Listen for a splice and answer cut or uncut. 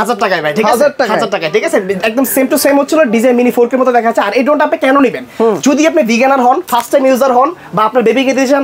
uncut